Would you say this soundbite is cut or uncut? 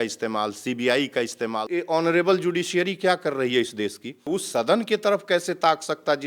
cut